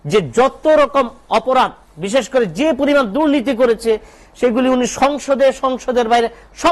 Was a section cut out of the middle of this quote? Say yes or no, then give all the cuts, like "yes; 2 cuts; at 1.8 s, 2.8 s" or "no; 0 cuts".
no; 0 cuts